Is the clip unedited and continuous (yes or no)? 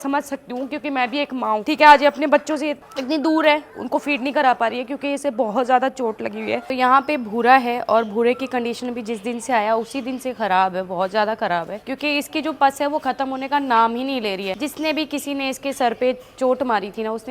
yes